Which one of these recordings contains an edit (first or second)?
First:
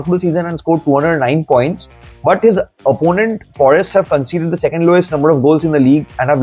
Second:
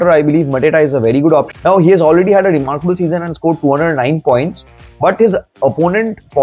second